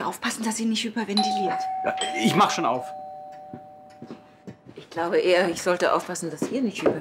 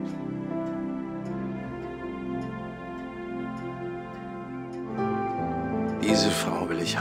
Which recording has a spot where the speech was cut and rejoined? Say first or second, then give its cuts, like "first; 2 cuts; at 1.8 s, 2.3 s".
first; 1 cut; at 2.0 s